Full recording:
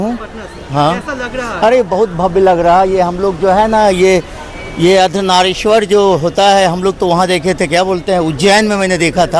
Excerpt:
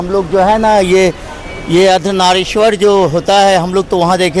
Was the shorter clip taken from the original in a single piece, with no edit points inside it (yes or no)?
yes